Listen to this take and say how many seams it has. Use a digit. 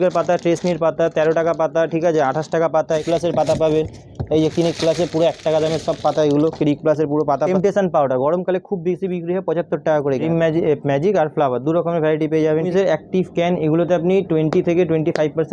4